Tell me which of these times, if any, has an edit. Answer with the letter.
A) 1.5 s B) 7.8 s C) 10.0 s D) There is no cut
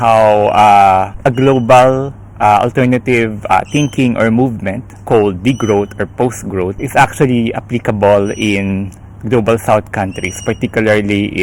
D